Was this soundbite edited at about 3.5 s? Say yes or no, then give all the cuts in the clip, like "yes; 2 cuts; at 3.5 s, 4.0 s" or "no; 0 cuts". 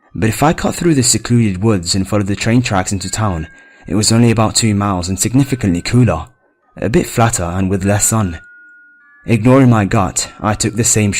no; 1 cut; at 9.6 s